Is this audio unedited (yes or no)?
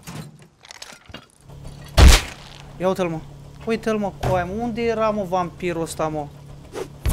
no